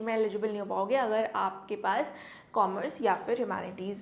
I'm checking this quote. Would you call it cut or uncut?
uncut